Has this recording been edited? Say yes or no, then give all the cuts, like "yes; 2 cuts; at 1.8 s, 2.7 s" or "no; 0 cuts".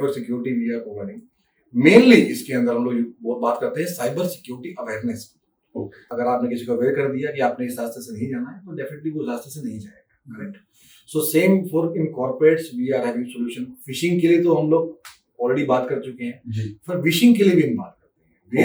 yes; 1 cut; at 6.1 s